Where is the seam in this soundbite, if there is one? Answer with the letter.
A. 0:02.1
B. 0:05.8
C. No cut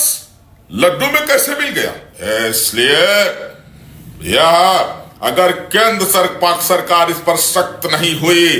A